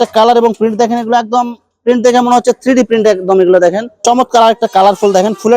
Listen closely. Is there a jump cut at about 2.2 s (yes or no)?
no